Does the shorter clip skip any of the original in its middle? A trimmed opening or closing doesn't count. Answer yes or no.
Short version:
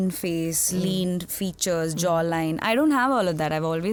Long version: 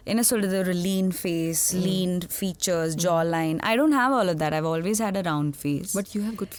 no